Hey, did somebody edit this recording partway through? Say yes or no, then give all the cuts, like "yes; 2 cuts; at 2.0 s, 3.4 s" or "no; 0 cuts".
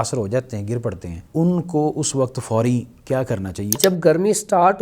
yes; 2 cuts; at 1.1 s, 3.8 s